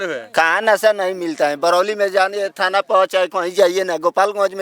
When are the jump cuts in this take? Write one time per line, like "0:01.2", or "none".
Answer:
none